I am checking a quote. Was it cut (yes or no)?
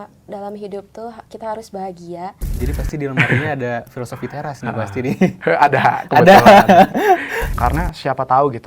yes